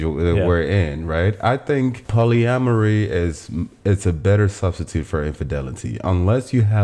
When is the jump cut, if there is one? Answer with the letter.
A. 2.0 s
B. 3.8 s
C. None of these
A